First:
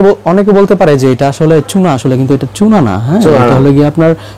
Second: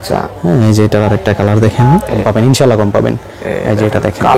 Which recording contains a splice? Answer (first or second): second